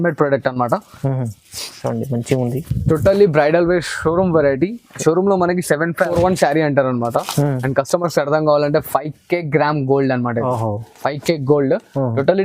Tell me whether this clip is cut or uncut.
cut